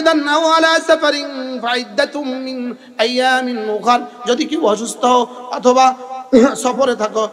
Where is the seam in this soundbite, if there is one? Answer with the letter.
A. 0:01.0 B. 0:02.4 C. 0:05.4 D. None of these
D